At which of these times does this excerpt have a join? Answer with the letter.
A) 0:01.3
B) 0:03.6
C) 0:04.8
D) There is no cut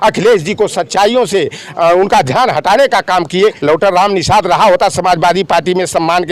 B